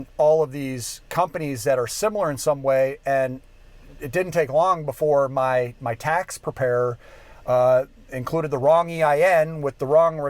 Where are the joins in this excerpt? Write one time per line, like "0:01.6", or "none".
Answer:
none